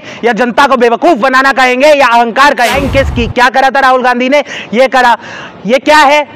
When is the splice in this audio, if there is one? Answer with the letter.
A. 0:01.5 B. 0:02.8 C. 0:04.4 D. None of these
B